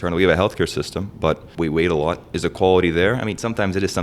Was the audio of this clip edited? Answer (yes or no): yes